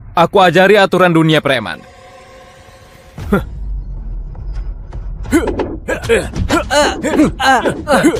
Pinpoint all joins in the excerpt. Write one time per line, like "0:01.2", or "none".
none